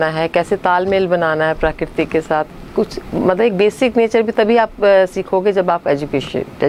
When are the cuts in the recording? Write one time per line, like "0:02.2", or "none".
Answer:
none